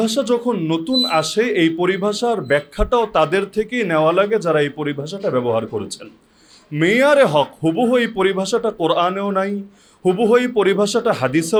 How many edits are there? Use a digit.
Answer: 0